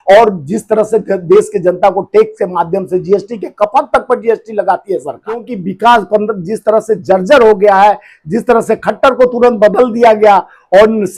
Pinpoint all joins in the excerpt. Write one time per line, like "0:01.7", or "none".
0:05.5